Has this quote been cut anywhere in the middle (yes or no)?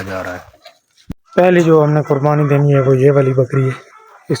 yes